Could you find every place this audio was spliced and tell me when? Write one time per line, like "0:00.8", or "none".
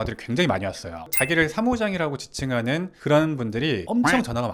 0:01.1